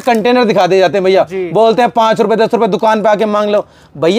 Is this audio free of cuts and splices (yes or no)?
yes